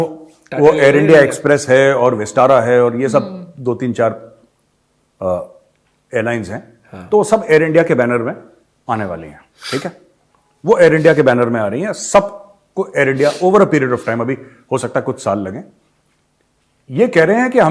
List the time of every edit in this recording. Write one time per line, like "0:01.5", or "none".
none